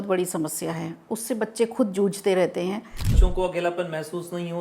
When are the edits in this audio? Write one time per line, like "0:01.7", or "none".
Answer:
0:03.1